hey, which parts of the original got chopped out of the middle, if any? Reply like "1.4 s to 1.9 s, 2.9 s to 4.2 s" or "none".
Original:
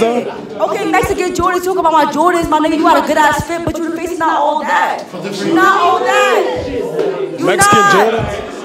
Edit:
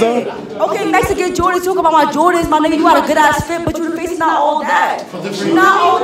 none